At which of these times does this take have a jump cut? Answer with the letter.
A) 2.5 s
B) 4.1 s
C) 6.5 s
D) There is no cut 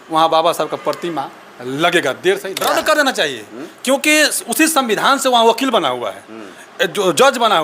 A